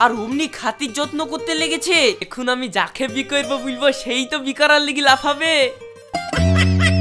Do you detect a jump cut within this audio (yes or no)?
yes